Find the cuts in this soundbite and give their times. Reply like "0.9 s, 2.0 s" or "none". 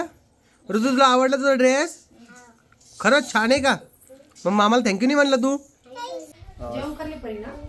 6.3 s